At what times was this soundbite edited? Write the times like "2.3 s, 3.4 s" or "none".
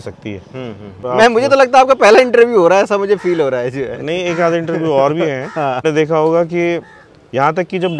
1.0 s, 5.8 s